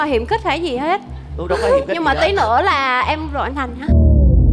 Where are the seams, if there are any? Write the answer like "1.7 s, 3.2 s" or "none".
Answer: none